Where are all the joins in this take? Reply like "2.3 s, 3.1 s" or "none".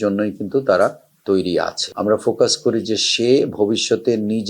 1.8 s